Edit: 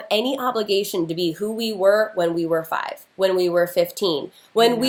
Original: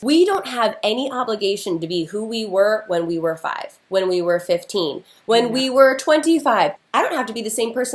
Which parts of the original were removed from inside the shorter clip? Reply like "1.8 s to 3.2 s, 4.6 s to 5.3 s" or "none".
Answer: none